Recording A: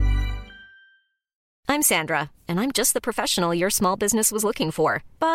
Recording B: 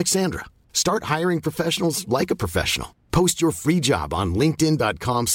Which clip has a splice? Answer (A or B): A